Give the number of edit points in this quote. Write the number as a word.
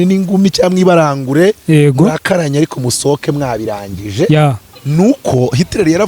one